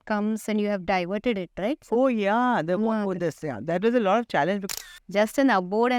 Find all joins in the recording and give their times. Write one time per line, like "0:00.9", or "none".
0:04.7